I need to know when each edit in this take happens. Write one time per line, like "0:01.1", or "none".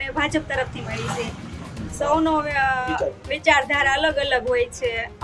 none

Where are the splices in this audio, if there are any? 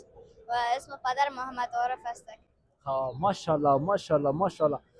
none

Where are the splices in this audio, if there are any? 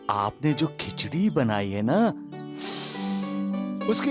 none

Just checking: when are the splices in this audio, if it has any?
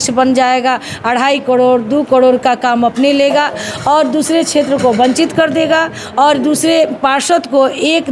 none

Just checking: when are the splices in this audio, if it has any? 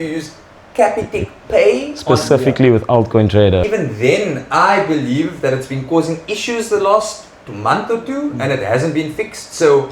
0:03.7

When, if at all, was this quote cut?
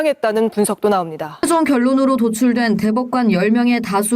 0:01.4

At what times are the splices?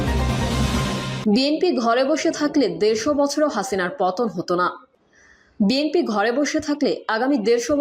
0:01.1

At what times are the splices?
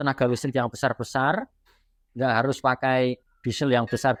none

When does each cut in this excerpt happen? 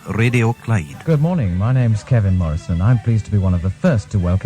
0:01.0

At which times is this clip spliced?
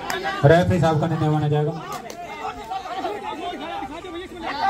none

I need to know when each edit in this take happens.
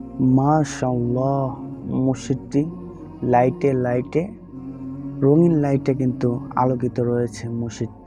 none

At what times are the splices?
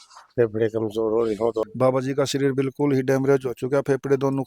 0:01.6

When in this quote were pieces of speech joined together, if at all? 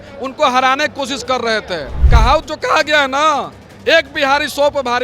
0:01.9

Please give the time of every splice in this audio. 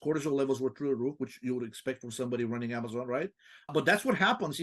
0:03.7

